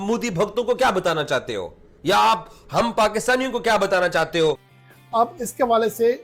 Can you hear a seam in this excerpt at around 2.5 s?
no; 1 cut; at 4.8 s

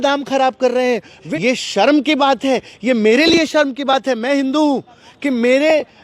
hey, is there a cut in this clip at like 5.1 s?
no; 1 cut; at 1.2 s

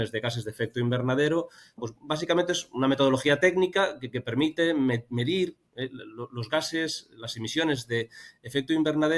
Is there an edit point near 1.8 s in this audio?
yes; 1 cut; at 1.8 s

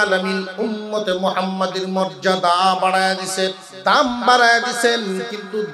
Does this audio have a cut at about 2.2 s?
no; 1 cut; at 3.7 s

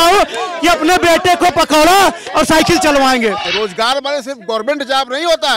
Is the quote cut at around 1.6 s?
no; 1 cut; at 3.4 s

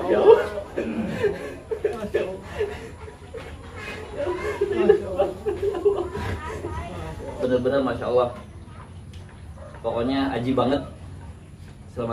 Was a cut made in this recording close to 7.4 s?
yes; 1 cut; at 7.4 s

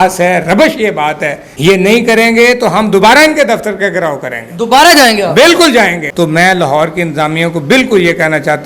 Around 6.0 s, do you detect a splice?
yes; 2 cuts; at 1.4 s, 6.0 s

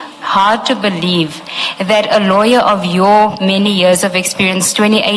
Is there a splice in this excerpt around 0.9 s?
no; 0 cuts

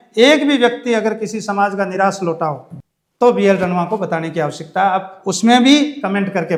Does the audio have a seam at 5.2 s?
no; 0 cuts

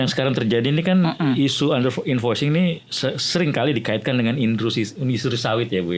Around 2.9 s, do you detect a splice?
no; 0 cuts

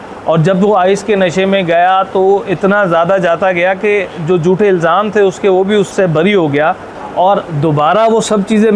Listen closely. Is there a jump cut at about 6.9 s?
yes; 2 cuts; at 5.9 s, 6.9 s

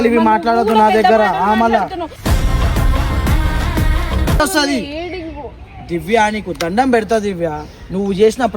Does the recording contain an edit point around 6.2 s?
no; 1 cut; at 4.4 s

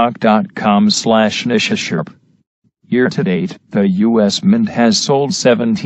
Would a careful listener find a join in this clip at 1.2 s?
yes; 1 cut; at 1.2 s

